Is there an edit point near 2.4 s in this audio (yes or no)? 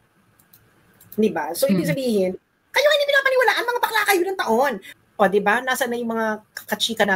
no